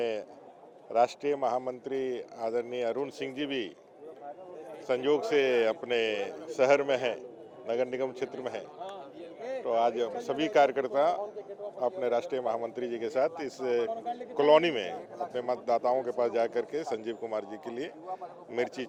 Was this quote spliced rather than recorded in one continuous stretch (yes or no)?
no